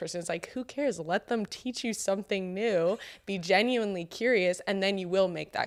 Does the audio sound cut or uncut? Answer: uncut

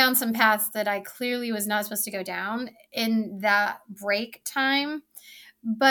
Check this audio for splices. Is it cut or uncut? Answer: uncut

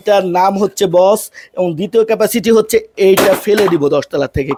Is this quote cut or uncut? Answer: uncut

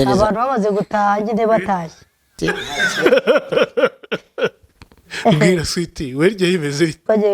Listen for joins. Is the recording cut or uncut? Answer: cut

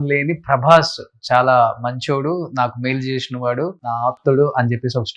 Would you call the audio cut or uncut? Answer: cut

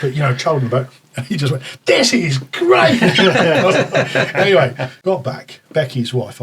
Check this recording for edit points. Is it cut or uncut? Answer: cut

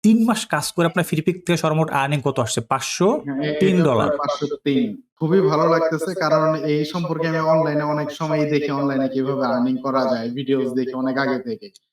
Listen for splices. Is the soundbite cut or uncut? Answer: cut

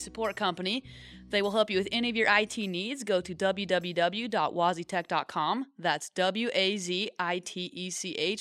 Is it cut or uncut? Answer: uncut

